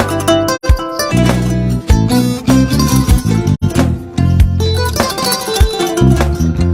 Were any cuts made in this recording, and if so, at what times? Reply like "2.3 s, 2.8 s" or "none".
3.6 s